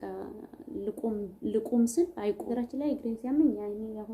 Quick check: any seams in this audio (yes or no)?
yes